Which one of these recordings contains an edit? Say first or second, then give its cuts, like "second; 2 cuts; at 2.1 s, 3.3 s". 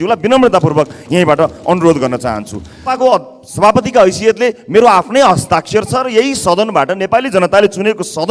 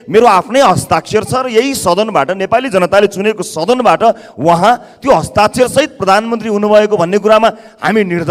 first; 1 cut; at 3.0 s